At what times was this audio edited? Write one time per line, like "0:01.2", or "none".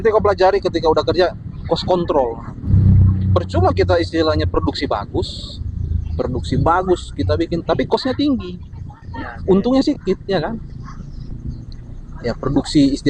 0:02.7